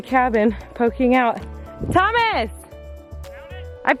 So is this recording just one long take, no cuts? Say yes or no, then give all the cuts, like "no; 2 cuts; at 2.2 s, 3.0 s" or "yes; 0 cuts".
yes; 0 cuts